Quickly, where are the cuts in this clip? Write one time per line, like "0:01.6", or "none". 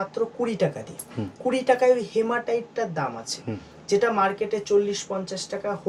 none